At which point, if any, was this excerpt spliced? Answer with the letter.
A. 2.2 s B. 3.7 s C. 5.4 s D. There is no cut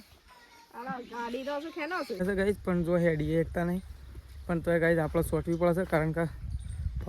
A